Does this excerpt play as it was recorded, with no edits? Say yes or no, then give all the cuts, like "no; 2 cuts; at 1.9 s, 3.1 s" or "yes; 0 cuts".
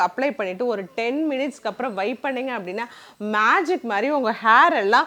yes; 0 cuts